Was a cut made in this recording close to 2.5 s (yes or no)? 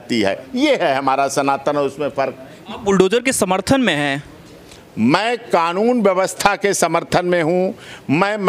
yes